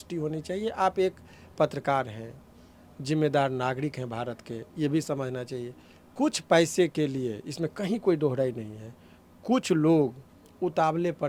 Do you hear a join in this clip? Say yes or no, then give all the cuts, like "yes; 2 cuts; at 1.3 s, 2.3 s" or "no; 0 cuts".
no; 0 cuts